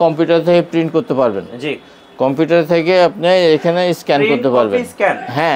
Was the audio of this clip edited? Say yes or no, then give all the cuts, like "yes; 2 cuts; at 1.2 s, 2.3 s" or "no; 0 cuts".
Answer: no; 0 cuts